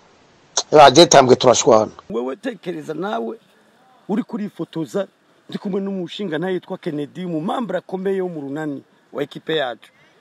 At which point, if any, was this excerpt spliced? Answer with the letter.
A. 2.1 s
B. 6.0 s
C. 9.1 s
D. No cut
A